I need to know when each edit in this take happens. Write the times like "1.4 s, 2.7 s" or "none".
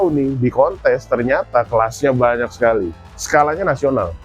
3.1 s